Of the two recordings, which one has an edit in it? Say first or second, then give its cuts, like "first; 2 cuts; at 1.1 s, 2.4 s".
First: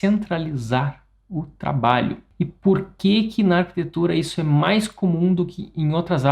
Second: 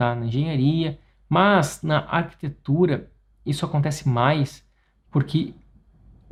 first; 1 cut; at 2.2 s